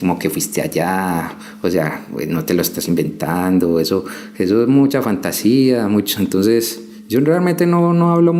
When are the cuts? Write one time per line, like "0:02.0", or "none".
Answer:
none